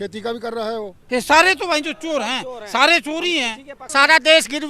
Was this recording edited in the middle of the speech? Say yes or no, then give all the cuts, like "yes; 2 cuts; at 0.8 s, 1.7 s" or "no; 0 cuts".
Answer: yes; 2 cuts; at 1.0 s, 3.7 s